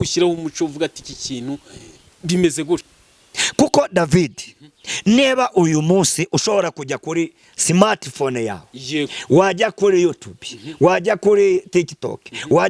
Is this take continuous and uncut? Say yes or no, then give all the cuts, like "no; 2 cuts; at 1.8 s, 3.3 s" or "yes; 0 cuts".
no; 1 cut; at 2.9 s